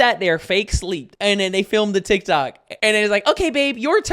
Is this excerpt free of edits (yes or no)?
no